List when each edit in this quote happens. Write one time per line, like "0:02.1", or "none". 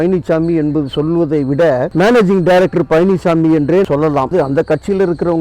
0:04.3